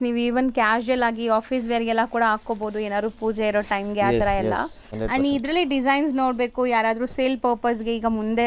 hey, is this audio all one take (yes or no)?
no